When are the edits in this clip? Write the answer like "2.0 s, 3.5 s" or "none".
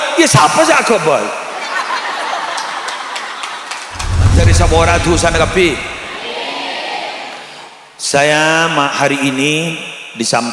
4.3 s